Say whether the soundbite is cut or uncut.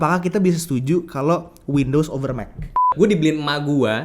cut